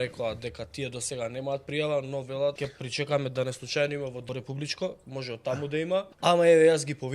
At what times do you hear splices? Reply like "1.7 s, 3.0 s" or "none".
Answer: 2.7 s, 4.2 s, 6.1 s